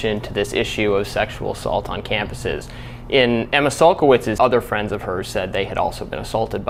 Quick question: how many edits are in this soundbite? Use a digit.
0